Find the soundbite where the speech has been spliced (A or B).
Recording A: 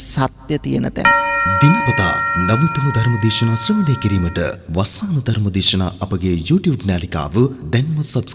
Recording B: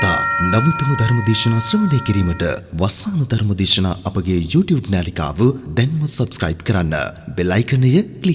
A